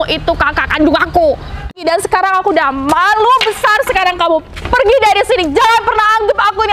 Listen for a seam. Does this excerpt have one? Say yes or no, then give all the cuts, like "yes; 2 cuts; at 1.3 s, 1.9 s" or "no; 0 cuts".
yes; 1 cut; at 1.8 s